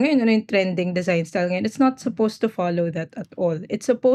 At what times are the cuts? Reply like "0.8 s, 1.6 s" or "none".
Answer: none